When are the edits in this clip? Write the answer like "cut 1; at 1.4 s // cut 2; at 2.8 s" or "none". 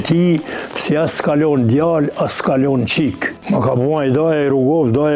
cut 1; at 3.3 s

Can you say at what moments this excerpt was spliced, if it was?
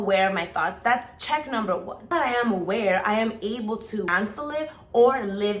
cut 1; at 2.1 s // cut 2; at 4.1 s

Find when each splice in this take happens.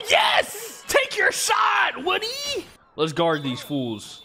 cut 1; at 2.8 s

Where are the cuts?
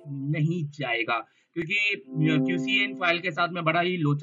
none

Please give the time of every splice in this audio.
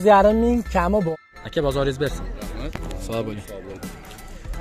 cut 1; at 1.1 s

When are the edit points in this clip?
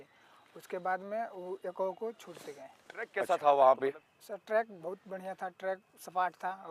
cut 1; at 3.2 s

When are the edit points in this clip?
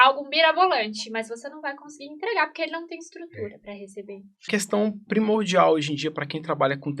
cut 1; at 4.5 s

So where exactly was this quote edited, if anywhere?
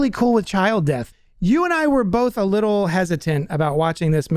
cut 1; at 1.1 s

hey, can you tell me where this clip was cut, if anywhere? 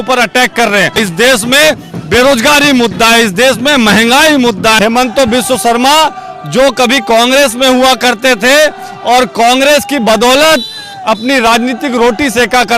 cut 1; at 1.0 s // cut 2; at 4.8 s

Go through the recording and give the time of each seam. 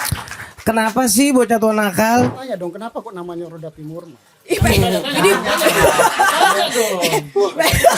cut 1; at 2.4 s

